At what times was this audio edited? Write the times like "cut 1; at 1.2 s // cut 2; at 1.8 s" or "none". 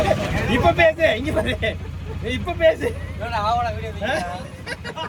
none

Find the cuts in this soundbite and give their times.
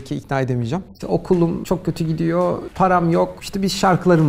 cut 1; at 0.9 s // cut 2; at 1.6 s // cut 3; at 2.7 s // cut 4; at 3.4 s

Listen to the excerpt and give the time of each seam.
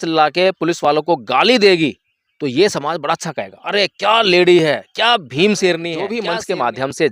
cut 1; at 6.2 s

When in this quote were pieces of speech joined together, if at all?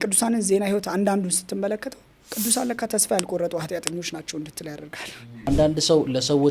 cut 1; at 5.5 s

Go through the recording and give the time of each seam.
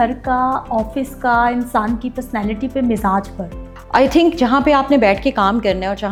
none

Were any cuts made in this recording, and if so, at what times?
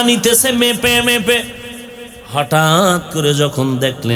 none

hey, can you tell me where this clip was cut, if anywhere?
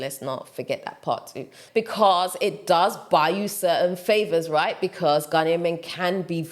cut 1; at 1.6 s

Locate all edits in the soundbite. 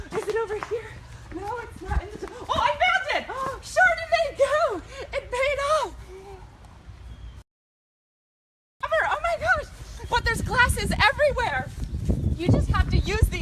cut 1; at 5.0 s

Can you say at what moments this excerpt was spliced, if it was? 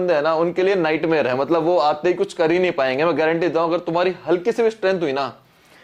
none

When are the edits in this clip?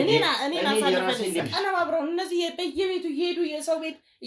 cut 1; at 1.4 s

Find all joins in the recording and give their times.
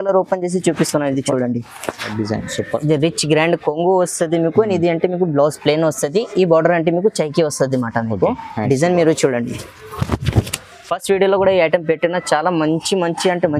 cut 1; at 2.1 s

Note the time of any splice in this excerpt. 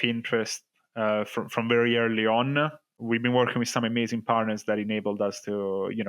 cut 1; at 2.9 s

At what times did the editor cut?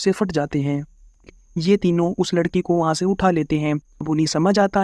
cut 1; at 1.2 s // cut 2; at 3.9 s

